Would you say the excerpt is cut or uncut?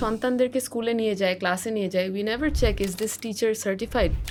uncut